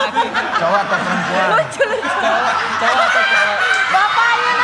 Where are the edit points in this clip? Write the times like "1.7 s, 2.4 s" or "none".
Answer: none